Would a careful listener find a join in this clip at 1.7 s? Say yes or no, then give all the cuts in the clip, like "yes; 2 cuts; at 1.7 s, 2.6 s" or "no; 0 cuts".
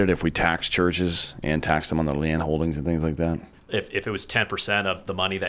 no; 1 cut; at 3.5 s